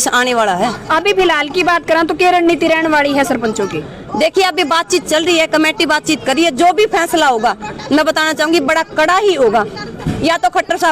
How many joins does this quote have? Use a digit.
0